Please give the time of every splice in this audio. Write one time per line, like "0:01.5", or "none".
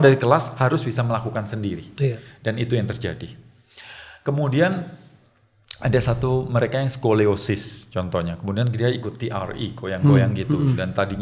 none

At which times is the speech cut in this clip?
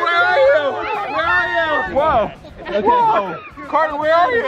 none

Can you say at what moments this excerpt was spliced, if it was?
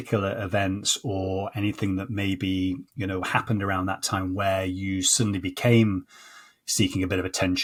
none

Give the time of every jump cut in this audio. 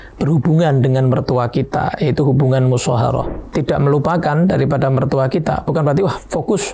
0:03.4

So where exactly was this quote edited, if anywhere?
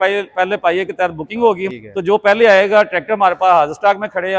0:01.6

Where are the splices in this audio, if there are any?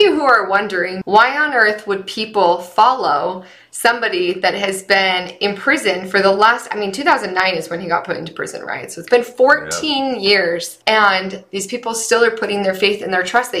0:01.0
0:10.7

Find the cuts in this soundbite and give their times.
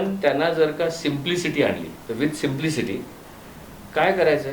none

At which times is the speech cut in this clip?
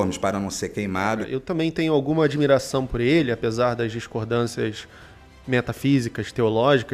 0:01.3

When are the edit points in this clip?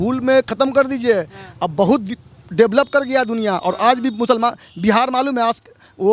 none

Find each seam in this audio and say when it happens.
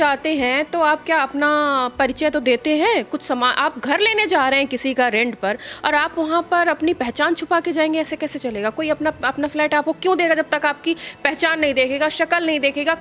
none

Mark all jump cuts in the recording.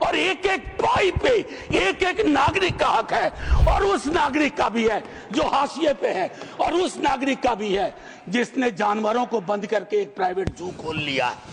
none

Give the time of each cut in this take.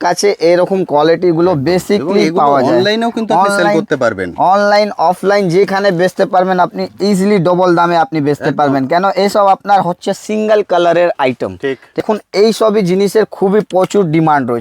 0:12.0

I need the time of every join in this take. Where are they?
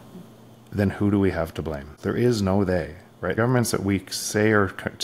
0:01.9
0:03.4

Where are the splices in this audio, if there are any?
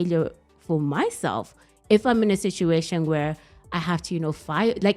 none

